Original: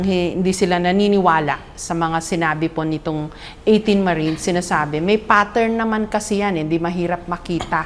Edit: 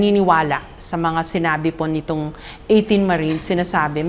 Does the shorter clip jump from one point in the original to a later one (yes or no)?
no